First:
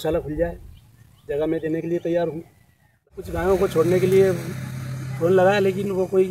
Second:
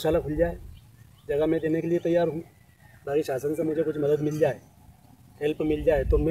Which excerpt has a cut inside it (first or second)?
first